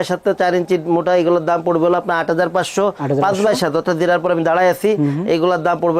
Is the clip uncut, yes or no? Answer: yes